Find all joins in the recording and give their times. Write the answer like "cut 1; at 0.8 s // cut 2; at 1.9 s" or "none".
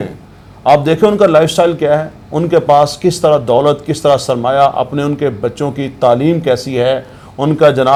none